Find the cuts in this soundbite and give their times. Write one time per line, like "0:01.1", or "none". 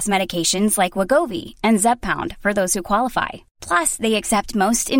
none